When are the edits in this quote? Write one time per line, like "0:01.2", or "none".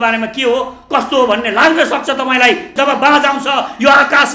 0:02.7